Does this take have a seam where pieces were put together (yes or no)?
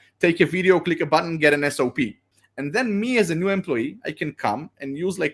yes